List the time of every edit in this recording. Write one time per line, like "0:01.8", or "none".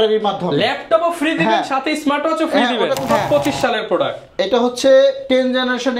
0:03.1